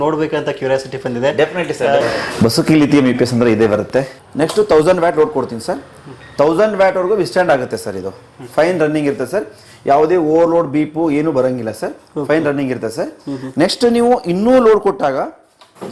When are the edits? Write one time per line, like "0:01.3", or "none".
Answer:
0:02.0
0:04.2